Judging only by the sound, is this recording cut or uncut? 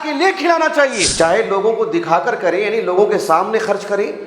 cut